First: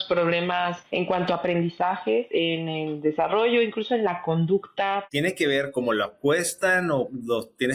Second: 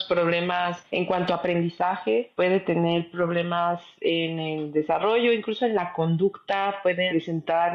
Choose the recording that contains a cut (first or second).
first